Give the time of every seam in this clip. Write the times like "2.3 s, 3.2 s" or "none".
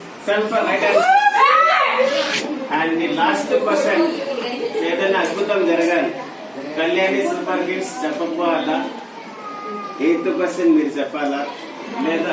2.4 s